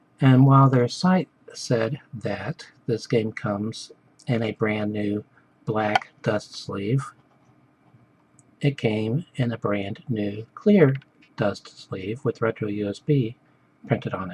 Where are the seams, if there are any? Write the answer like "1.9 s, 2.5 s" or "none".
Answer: 4.6 s